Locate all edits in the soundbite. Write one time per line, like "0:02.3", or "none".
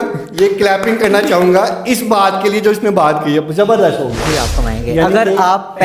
0:04.2